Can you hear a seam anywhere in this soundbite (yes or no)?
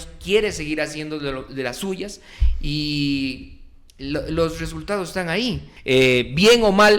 yes